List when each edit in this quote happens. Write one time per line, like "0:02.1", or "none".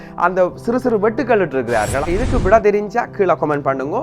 0:02.0